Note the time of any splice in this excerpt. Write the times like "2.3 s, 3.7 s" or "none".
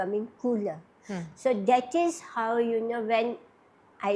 none